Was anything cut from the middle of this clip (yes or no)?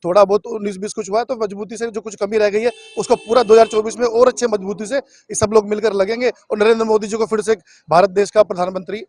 no